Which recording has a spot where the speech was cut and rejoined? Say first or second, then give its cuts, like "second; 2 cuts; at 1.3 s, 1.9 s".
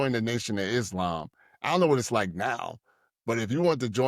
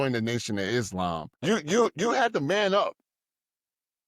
second; 1 cut; at 1.3 s